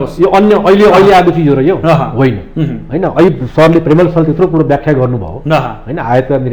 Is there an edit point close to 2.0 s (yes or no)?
no